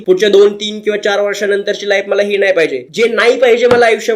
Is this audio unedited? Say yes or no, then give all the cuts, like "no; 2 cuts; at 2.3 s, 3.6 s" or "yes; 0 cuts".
no; 1 cut; at 2.8 s